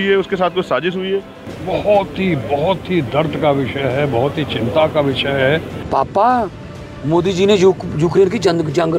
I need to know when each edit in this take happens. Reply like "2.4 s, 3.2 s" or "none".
1.5 s, 5.8 s